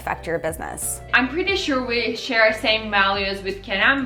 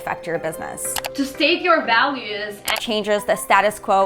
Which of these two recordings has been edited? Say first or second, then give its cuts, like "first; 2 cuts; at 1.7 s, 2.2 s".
second; 2 cuts; at 1.0 s, 2.8 s